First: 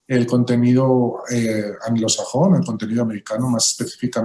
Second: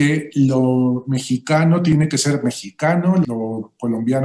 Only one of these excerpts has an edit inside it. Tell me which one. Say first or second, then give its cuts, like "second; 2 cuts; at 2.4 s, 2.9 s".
second; 2 cuts; at 1.9 s, 3.2 s